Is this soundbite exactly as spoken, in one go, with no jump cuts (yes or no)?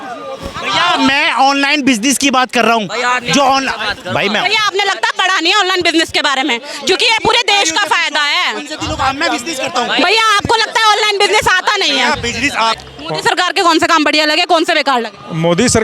no